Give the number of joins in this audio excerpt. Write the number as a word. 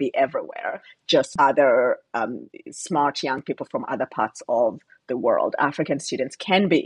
one